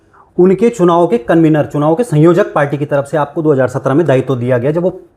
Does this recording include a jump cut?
no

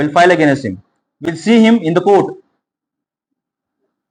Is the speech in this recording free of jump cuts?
yes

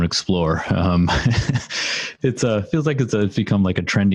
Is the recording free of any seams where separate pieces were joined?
yes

